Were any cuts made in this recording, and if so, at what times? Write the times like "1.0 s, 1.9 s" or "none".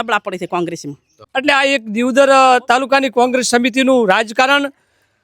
1.2 s